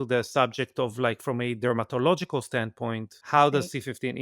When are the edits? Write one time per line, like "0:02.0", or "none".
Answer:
0:03.1